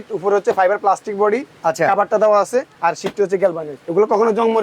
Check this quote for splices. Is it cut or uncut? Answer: cut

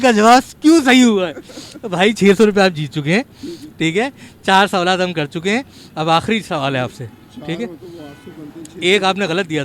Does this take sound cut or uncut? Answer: uncut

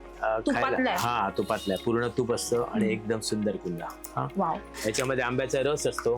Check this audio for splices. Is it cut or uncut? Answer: cut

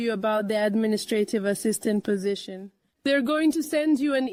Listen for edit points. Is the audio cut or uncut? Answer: uncut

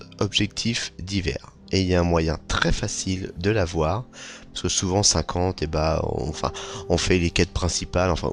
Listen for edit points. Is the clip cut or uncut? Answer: uncut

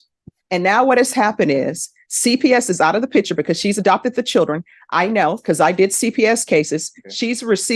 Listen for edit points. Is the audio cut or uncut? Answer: cut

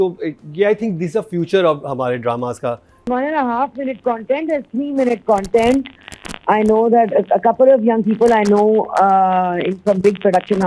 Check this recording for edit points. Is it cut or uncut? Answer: cut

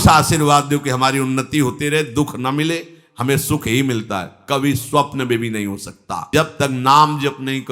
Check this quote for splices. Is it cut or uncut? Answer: cut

